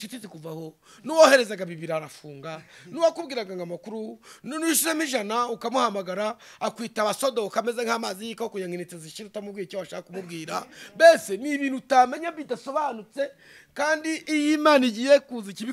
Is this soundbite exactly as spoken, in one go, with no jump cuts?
yes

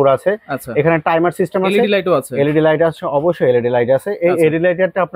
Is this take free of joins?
yes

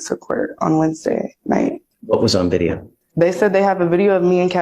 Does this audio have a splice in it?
yes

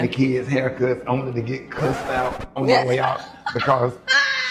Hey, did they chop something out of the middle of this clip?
no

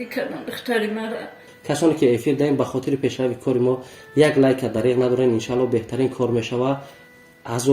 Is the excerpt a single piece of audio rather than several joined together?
no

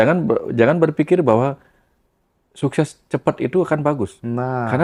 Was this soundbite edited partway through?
no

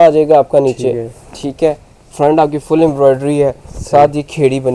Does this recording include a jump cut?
no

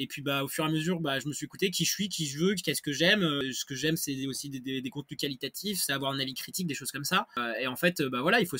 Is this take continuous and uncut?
no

